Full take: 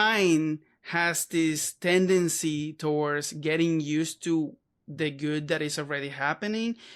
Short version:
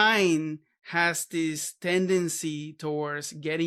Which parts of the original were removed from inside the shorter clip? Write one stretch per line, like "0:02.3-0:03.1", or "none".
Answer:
none